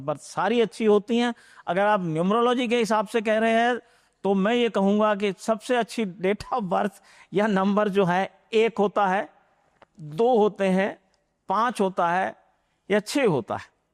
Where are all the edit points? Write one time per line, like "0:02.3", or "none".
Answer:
none